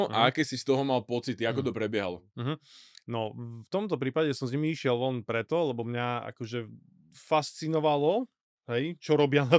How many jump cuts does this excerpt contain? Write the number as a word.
zero